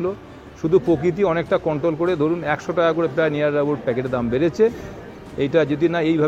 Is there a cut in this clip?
no; 0 cuts

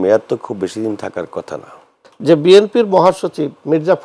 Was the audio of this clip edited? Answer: yes; 1 cut; at 2.1 s

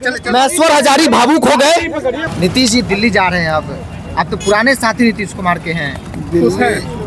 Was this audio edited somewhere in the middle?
no; 0 cuts

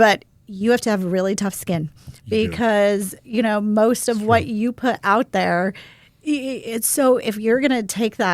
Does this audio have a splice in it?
no; 0 cuts

